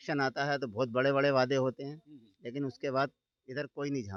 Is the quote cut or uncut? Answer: uncut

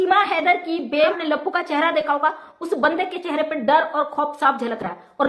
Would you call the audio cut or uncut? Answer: cut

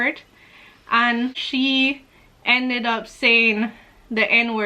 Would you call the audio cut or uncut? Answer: cut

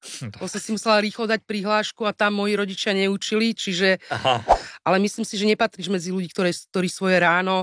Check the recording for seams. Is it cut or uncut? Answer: cut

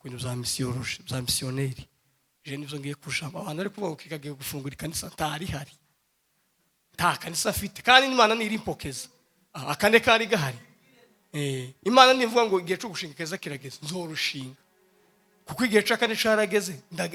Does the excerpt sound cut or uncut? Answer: uncut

